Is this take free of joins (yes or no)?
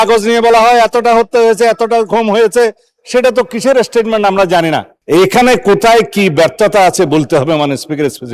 no